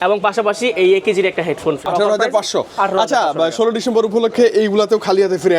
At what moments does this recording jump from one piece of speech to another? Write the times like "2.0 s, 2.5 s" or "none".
1.8 s